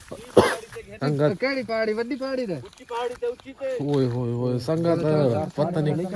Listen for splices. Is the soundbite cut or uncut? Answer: cut